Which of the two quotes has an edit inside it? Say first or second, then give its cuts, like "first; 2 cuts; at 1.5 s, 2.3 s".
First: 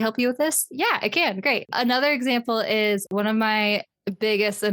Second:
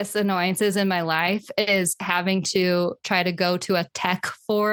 first; 2 cuts; at 1.7 s, 3.1 s